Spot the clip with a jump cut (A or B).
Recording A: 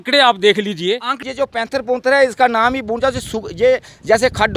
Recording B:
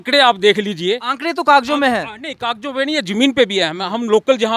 A